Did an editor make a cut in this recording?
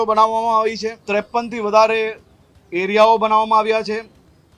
yes; 1 cut; at 0.9 s

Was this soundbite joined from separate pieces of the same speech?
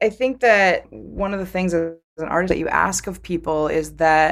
yes; 1 cut; at 0.9 s

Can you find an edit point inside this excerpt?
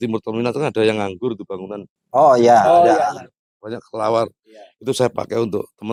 no; 0 cuts

